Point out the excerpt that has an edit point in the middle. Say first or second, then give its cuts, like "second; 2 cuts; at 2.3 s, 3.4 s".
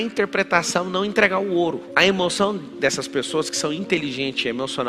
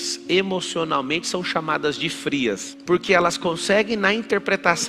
second; 1 cut; at 2.7 s